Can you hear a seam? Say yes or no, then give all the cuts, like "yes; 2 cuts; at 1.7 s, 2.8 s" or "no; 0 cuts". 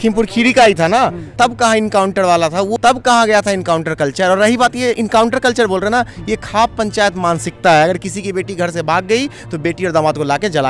no; 0 cuts